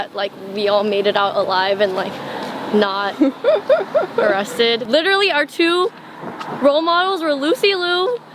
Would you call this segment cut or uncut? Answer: cut